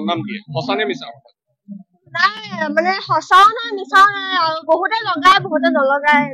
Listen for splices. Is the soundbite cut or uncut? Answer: uncut